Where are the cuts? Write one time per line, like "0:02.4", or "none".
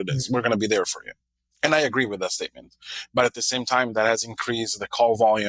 none